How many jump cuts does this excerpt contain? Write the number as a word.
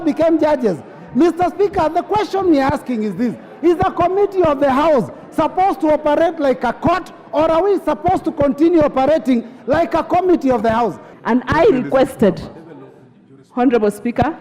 one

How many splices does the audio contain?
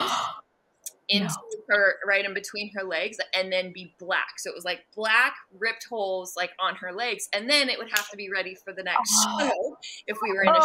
zero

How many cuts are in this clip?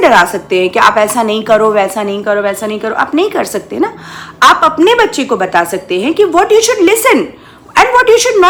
zero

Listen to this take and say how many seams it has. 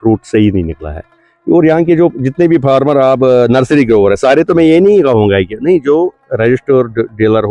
zero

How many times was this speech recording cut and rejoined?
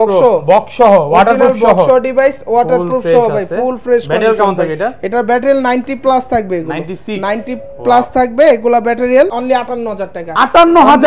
one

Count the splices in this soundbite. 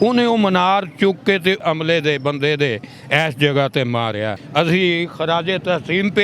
two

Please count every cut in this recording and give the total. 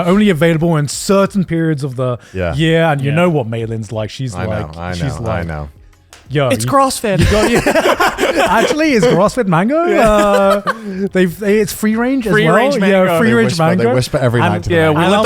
zero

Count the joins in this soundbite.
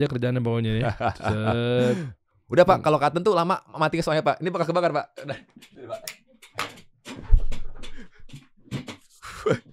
zero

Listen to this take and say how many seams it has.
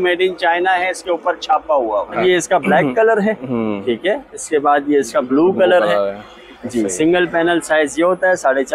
one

